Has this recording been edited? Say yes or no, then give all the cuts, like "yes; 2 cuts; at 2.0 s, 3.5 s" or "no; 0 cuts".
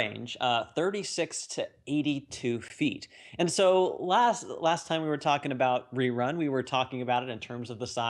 yes; 1 cut; at 4.2 s